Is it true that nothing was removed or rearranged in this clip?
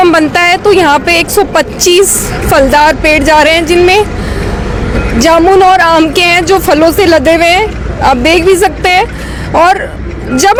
yes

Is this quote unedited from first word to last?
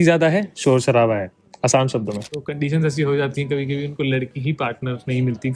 no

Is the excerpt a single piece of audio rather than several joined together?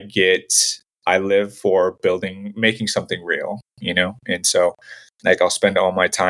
yes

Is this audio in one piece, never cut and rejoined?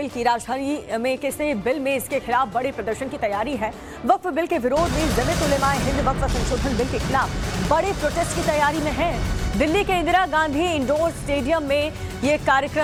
yes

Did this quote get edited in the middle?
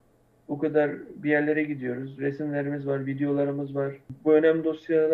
yes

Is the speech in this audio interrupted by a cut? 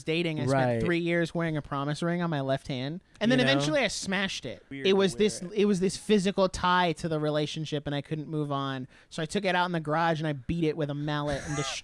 yes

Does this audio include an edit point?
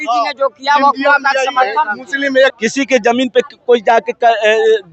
yes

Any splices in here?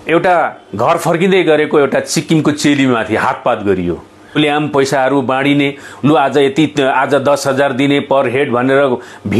yes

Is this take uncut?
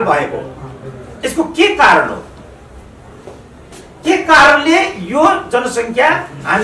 yes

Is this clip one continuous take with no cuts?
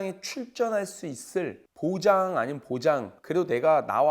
no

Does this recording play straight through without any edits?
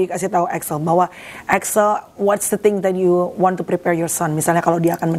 yes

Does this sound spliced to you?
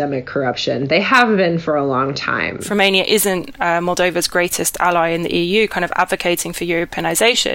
yes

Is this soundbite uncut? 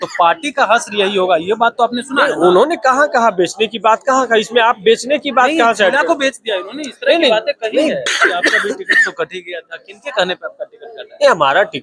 no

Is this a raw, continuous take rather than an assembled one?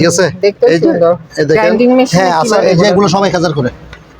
no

